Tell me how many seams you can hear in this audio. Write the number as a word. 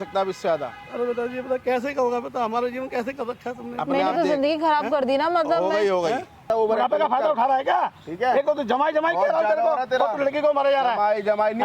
one